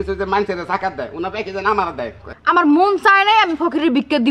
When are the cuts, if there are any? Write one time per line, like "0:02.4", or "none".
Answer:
0:02.3